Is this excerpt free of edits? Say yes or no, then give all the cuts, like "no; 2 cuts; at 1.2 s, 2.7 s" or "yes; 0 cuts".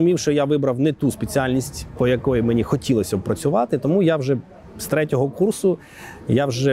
yes; 0 cuts